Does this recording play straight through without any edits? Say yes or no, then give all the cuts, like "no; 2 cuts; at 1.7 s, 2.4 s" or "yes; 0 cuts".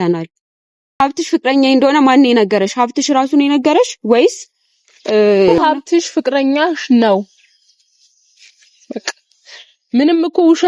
no; 2 cuts; at 1.0 s, 5.5 s